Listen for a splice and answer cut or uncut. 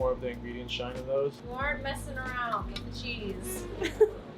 cut